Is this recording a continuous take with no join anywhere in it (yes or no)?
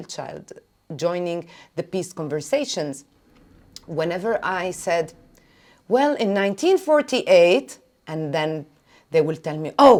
yes